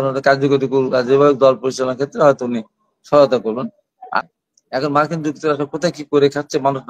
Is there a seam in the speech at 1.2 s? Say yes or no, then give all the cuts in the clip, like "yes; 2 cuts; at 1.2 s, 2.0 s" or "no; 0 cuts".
no; 1 cut; at 4.2 s